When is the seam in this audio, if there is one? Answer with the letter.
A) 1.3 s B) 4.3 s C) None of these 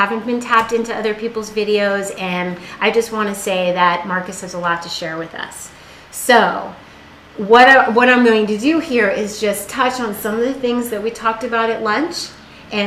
B